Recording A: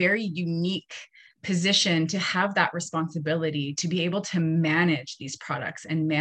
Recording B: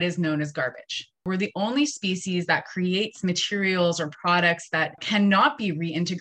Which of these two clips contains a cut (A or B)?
B